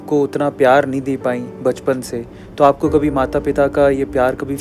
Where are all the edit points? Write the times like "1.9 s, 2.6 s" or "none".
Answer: none